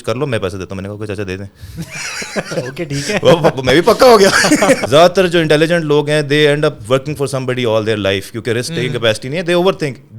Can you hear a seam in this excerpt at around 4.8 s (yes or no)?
yes